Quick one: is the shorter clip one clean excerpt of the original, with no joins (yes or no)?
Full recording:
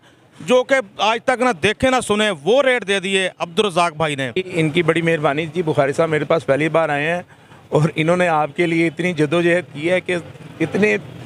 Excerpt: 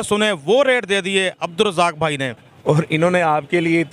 no